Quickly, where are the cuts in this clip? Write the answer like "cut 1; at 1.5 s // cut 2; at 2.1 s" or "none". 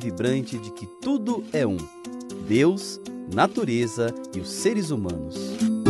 none